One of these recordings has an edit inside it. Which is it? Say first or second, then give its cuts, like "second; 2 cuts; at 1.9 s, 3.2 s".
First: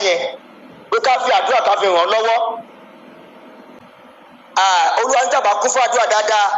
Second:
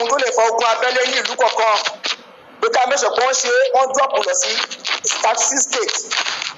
first; 1 cut; at 3.7 s